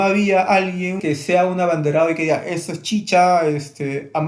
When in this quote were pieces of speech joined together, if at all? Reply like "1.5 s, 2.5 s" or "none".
1.0 s